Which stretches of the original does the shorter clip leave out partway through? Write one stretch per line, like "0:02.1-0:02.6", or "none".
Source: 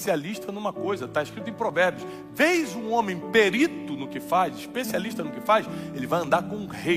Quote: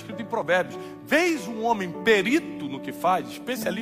none